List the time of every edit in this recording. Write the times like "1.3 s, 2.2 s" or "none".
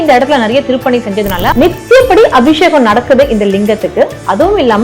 1.5 s